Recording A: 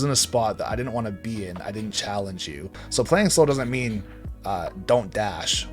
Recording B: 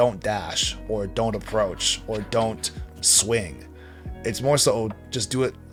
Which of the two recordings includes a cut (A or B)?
A